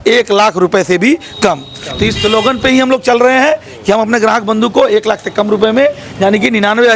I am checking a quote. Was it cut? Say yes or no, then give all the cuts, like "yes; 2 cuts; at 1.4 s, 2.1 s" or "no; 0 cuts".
no; 0 cuts